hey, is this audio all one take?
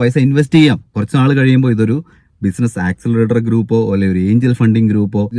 no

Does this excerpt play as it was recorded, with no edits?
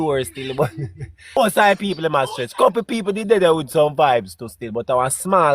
no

